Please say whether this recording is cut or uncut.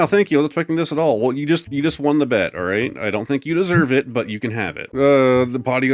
cut